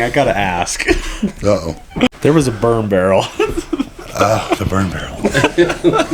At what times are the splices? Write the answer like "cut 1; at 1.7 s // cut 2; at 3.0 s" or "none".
cut 1; at 2.1 s